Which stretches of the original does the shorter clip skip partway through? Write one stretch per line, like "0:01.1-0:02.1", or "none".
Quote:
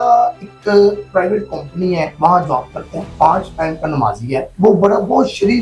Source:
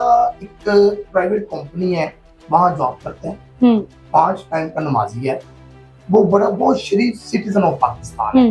0:02.1-0:02.4
0:03.3-0:04.0
0:05.4-0:06.0